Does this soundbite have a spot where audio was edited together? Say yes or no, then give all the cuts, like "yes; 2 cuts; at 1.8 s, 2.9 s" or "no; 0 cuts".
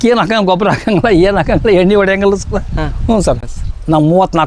no; 0 cuts